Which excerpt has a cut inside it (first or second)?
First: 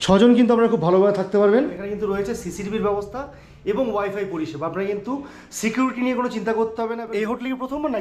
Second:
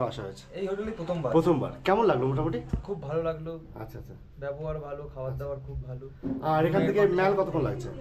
first